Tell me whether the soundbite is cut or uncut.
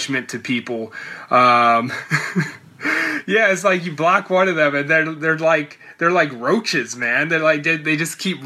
uncut